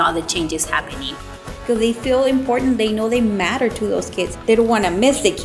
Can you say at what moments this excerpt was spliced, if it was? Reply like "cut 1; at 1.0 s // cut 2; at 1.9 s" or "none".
cut 1; at 1.6 s